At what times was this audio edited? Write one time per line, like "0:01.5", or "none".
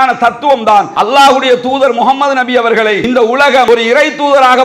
0:00.9
0:03.4